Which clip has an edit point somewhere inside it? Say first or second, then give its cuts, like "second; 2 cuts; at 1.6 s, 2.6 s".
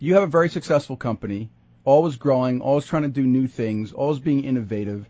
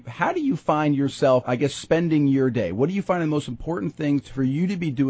second; 2 cuts; at 1.5 s, 4.3 s